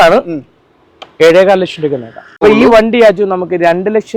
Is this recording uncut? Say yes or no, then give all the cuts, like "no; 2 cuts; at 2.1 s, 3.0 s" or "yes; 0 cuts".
no; 1 cut; at 2.4 s